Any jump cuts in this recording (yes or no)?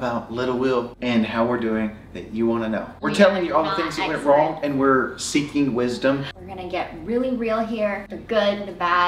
yes